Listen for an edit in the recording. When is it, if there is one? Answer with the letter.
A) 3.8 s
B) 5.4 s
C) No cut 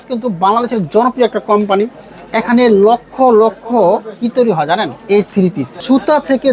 B